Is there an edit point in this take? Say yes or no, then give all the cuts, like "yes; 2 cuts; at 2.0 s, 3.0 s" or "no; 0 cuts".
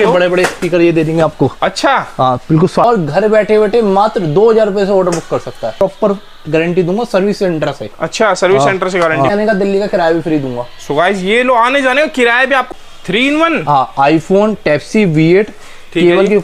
yes; 4 cuts; at 2.8 s, 5.7 s, 9.3 s, 12.7 s